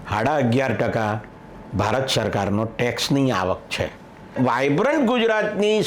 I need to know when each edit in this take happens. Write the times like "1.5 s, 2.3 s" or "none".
4.4 s